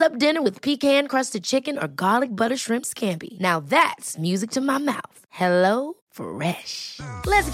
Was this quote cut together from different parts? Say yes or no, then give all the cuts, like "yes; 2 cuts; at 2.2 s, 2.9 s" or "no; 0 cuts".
no; 0 cuts